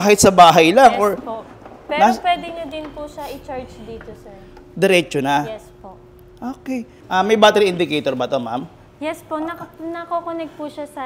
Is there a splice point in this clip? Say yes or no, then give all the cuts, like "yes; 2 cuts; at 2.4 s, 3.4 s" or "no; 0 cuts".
yes; 1 cut; at 6.9 s